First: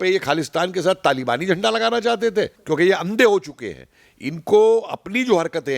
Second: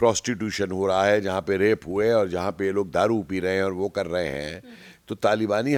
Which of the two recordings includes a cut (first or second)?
first